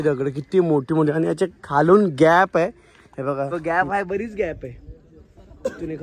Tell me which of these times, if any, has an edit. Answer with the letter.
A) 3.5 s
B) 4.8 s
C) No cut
A